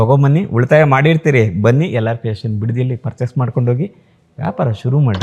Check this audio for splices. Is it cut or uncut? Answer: uncut